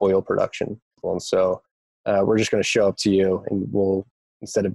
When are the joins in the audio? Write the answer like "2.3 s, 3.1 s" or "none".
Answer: 1.0 s, 1.8 s